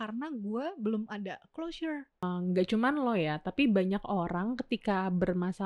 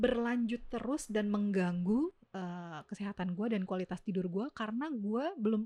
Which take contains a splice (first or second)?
first